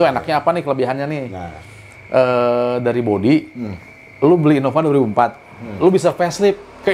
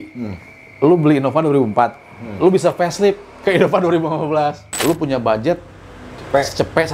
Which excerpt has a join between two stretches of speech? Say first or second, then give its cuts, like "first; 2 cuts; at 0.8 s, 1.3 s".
second; 1 cut; at 4.7 s